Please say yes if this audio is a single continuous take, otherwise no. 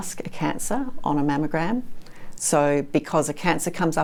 yes